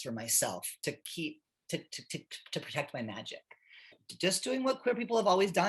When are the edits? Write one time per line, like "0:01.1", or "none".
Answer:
0:04.0